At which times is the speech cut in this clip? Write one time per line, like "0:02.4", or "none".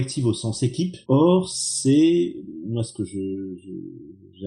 0:01.0